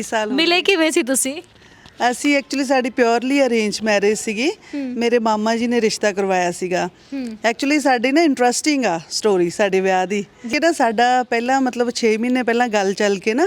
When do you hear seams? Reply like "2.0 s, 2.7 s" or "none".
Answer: 10.5 s